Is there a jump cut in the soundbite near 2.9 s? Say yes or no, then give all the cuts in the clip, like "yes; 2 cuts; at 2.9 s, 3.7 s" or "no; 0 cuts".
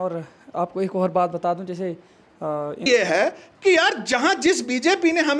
yes; 1 cut; at 2.9 s